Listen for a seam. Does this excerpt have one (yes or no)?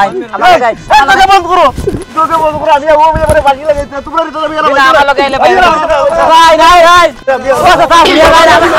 no